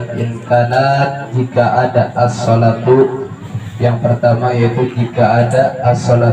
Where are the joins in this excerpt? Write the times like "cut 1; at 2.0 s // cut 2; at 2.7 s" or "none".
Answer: none